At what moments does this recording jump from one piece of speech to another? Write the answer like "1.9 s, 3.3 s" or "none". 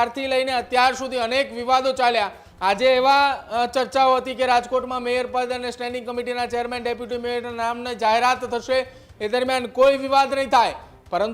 none